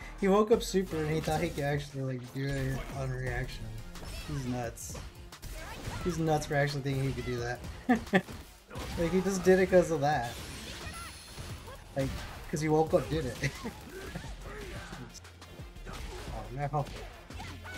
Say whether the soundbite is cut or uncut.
uncut